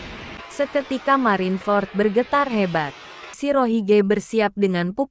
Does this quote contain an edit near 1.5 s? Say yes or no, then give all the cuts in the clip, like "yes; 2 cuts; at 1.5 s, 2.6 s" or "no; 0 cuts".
no; 1 cut; at 3.4 s